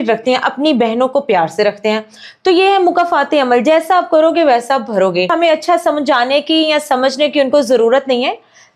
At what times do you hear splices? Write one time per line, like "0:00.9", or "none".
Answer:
0:05.3